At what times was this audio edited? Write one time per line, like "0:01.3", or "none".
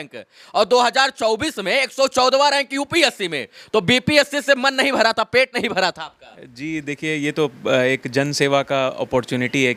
none